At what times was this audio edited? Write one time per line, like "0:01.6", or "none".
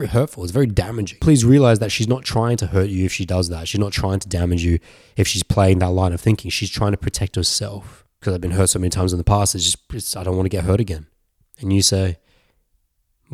0:01.1
0:08.1